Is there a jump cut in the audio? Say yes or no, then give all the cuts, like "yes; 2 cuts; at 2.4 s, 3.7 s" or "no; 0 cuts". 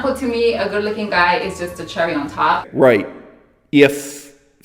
yes; 1 cut; at 2.7 s